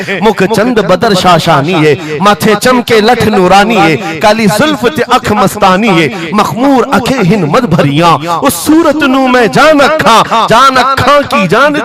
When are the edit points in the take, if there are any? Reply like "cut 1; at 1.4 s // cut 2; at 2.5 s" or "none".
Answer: none